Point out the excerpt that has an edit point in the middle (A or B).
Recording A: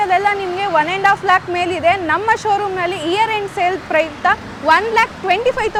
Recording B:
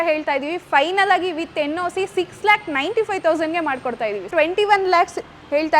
B